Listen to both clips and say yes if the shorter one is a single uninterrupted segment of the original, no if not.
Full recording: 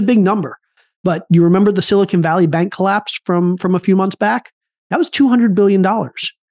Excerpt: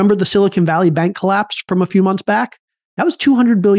no